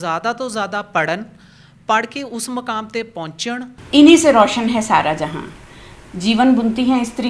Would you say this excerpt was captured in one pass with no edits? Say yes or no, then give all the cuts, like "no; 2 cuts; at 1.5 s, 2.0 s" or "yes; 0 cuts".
no; 1 cut; at 3.7 s